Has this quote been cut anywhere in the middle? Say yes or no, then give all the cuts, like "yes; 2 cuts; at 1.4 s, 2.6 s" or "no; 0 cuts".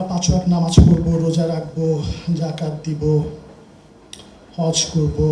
no; 0 cuts